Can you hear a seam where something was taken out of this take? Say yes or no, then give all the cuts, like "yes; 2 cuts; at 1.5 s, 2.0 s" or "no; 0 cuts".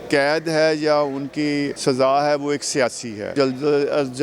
yes; 2 cuts; at 1.7 s, 3.3 s